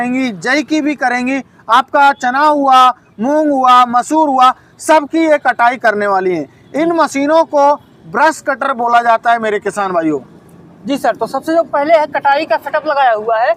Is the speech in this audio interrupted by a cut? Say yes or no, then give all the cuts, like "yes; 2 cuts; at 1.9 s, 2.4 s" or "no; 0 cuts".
no; 0 cuts